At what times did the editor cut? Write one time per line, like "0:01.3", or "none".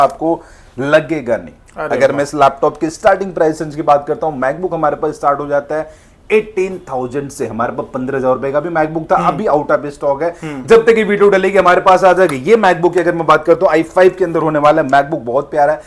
none